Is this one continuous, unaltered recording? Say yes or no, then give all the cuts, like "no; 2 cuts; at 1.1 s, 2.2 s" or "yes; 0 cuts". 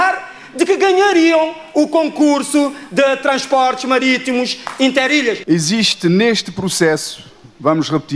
no; 1 cut; at 5.4 s